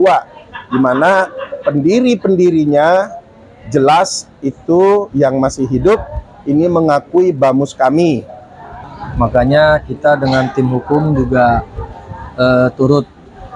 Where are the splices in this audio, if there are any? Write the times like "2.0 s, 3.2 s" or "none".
8.7 s